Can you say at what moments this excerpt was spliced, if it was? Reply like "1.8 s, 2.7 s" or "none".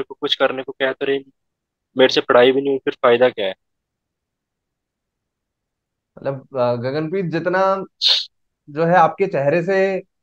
none